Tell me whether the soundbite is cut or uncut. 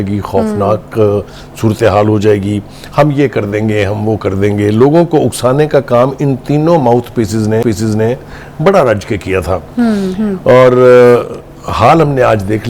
uncut